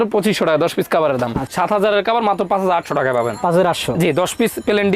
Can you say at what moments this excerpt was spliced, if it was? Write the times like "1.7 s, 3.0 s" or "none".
1.5 s